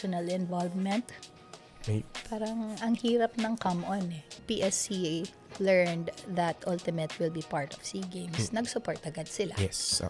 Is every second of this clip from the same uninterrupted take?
no; 1 cut; at 4.4 s

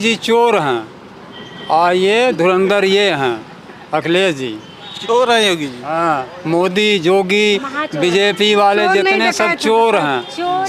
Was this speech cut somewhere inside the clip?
no; 0 cuts

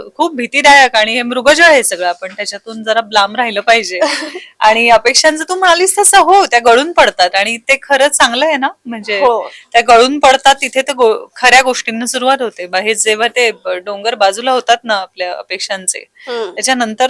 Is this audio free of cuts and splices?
yes; 0 cuts

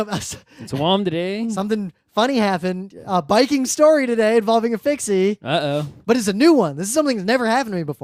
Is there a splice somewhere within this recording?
no; 0 cuts

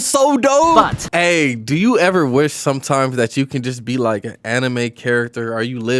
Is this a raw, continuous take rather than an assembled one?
no; 1 cut; at 1.0 s

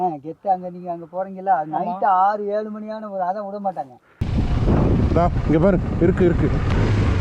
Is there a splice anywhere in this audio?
yes; 1 cut; at 4.2 s

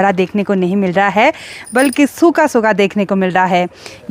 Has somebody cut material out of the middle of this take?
no; 0 cuts

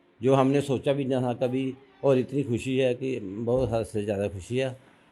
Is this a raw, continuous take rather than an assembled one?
yes; 0 cuts

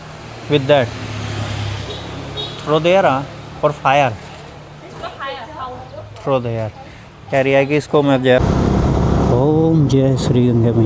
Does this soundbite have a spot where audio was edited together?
yes; 1 cut; at 8.4 s

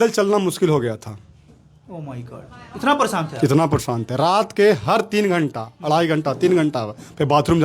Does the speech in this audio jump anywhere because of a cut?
no; 0 cuts

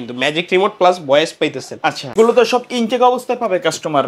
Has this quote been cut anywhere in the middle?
yes; 1 cut; at 2.1 s

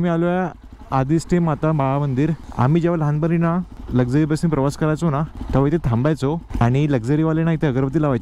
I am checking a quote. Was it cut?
yes; 4 cuts; at 2.4 s, 3.8 s, 5.4 s, 6.5 s

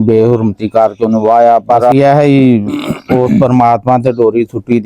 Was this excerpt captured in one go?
no; 1 cut; at 1.9 s

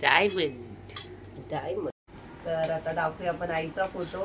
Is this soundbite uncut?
no; 1 cut; at 2.0 s

